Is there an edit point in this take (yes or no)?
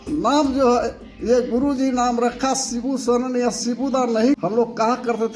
yes